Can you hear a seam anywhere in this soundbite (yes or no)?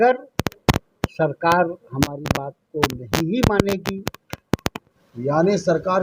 yes